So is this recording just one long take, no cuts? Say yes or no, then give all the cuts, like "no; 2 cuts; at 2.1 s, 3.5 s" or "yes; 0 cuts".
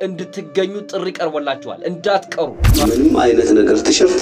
no; 1 cut; at 2.7 s